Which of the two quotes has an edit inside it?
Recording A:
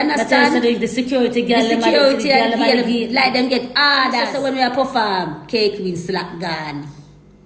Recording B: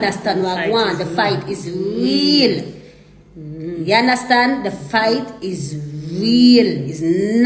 A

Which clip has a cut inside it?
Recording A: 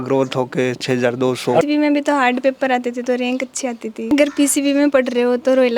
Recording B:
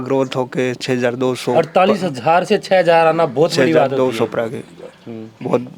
A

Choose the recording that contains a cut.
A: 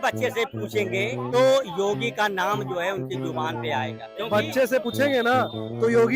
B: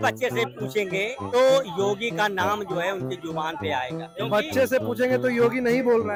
A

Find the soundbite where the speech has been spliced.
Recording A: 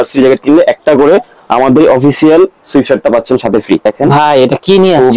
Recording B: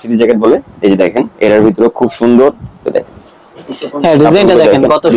A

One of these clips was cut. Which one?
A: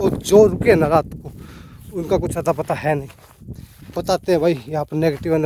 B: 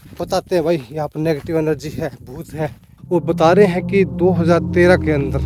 B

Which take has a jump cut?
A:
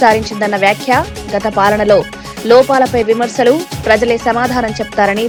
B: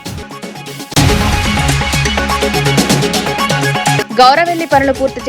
B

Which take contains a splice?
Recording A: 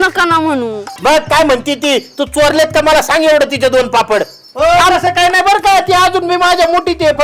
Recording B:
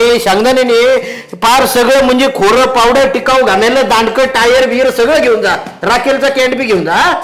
A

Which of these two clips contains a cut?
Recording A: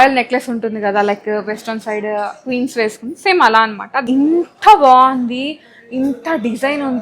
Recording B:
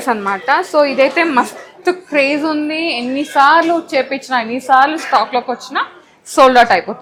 A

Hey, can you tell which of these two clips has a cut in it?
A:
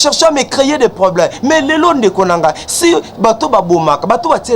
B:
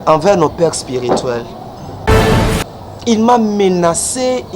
B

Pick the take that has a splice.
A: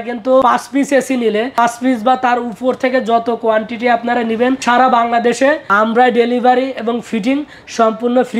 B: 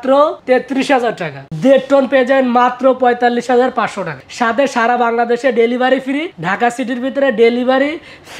B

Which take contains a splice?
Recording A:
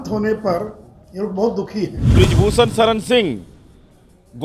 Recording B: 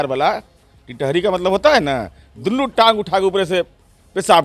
A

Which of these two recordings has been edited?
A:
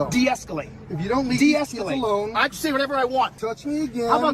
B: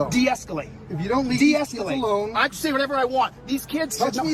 A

